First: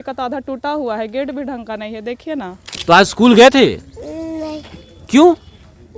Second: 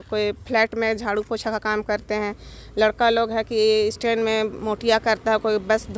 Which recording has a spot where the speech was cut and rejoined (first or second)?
first